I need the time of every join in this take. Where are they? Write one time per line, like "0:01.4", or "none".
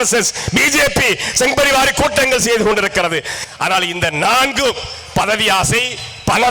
0:03.4